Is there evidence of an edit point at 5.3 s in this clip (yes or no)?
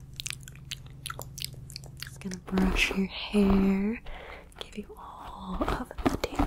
no